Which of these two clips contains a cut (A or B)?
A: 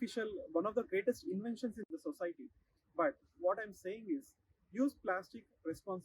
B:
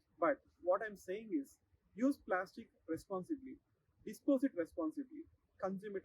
A